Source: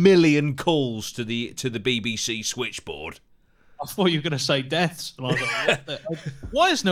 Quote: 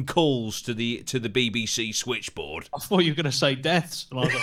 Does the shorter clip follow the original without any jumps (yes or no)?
no